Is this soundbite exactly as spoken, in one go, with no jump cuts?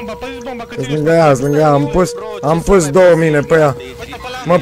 yes; 0 cuts

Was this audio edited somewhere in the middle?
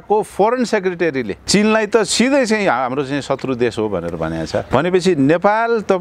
yes; 2 cuts; at 1.4 s, 4.7 s

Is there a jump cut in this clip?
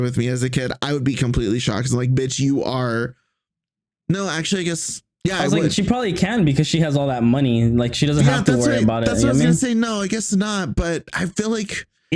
no; 0 cuts

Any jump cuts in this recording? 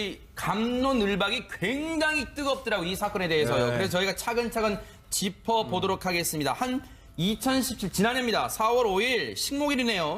yes; 1 cut; at 6.4 s

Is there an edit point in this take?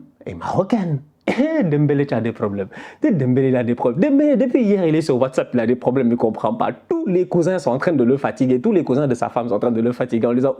no; 0 cuts

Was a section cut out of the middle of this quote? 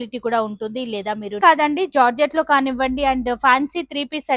yes; 1 cut; at 1.4 s

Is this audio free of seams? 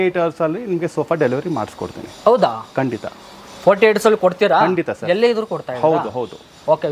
yes; 0 cuts

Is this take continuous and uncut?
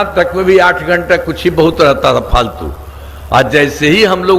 yes; 0 cuts

